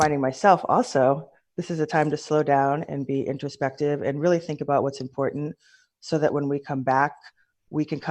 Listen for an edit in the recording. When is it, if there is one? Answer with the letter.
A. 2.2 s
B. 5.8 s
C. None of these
C